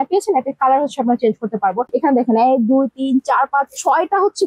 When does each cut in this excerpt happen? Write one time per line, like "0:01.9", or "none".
none